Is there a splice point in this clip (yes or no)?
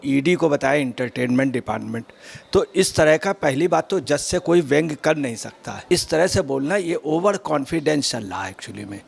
yes